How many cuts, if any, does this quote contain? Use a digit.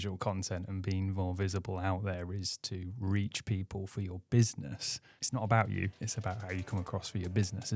2